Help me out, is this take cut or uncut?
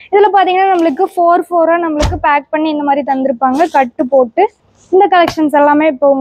uncut